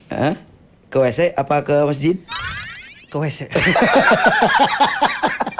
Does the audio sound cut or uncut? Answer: uncut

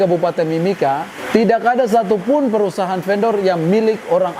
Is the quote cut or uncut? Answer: uncut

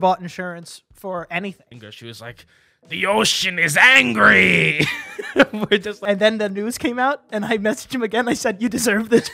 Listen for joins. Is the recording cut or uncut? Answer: cut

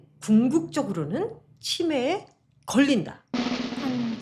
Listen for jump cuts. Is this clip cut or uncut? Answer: uncut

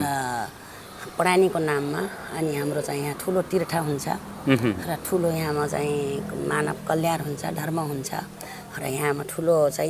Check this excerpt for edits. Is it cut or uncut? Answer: uncut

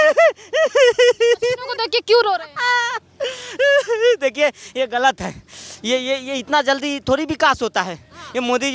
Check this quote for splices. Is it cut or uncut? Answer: uncut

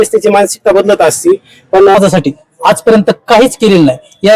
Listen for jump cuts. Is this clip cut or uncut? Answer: cut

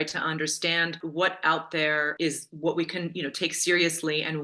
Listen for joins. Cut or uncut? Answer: cut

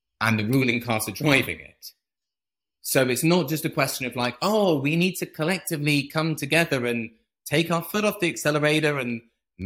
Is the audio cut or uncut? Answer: uncut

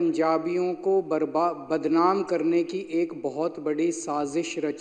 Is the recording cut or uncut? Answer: uncut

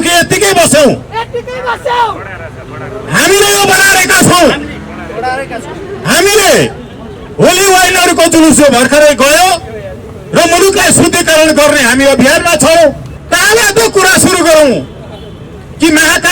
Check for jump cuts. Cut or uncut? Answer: cut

